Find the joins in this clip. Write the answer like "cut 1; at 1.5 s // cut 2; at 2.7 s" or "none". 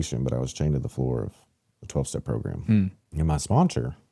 cut 1; at 3.0 s